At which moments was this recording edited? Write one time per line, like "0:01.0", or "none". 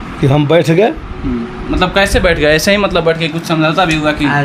none